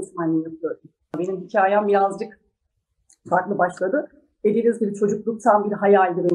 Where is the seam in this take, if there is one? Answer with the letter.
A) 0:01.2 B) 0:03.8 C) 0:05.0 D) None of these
A